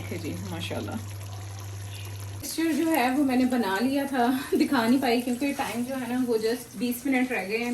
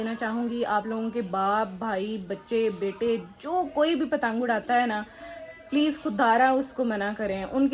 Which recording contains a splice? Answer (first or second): first